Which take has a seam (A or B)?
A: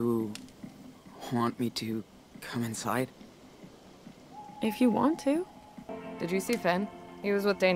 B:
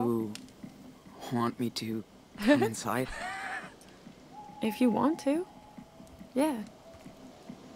A